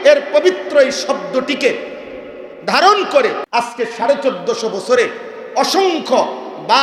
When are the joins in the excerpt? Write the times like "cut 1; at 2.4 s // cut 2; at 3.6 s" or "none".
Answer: cut 1; at 3.4 s